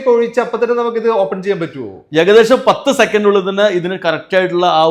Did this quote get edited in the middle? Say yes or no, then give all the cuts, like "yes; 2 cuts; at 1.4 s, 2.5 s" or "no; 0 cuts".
no; 0 cuts